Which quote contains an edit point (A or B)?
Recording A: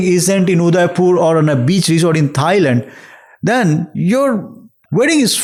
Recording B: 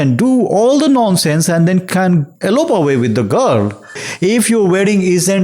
B